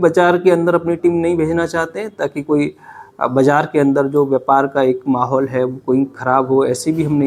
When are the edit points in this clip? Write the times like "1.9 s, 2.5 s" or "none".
none